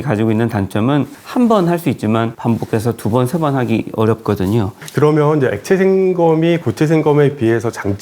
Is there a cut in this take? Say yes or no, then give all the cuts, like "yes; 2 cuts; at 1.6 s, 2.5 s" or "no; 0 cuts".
yes; 1 cut; at 4.8 s